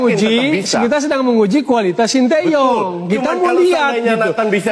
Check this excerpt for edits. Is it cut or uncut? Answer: uncut